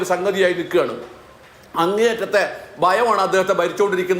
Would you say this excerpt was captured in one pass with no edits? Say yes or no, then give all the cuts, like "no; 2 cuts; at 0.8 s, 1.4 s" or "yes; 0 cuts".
yes; 0 cuts